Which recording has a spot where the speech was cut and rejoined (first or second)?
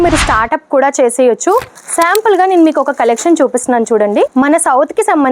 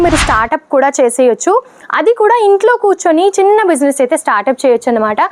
first